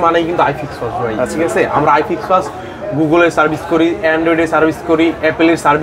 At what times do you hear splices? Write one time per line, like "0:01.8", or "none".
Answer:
none